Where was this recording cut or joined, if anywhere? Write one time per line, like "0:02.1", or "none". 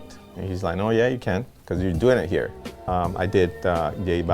0:02.7